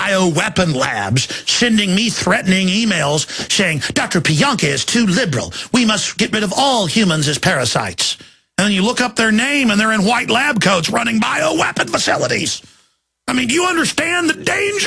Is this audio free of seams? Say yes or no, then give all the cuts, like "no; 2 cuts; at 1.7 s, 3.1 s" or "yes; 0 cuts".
no; 1 cut; at 6.3 s